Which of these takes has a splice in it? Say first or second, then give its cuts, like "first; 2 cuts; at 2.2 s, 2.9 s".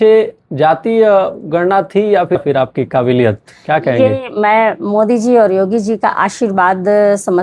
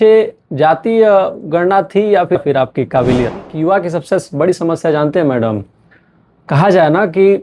second; 1 cut; at 3.5 s